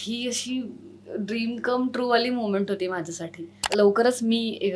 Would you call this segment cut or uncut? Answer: cut